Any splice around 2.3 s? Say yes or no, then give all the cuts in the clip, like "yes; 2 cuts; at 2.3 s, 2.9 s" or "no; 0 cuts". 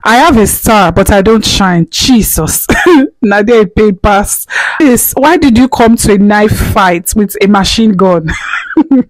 no; 1 cut; at 4.8 s